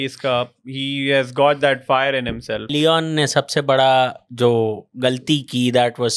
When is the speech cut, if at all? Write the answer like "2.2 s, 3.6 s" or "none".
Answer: 2.7 s